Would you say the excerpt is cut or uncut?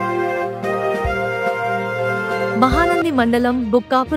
uncut